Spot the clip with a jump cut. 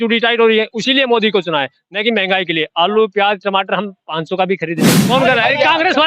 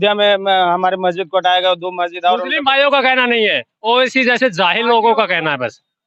first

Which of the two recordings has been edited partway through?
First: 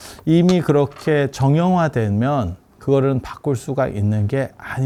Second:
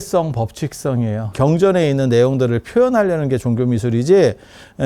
second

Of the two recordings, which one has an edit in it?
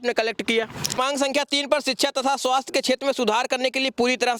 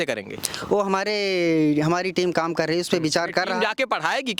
first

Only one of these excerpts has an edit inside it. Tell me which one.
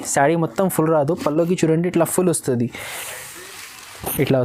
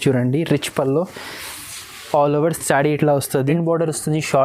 second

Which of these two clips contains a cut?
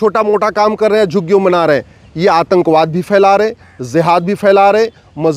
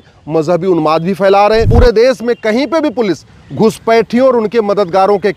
second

